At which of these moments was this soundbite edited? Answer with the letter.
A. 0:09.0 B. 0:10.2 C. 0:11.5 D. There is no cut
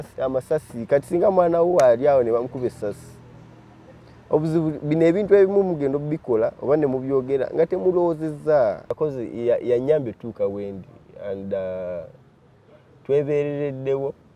A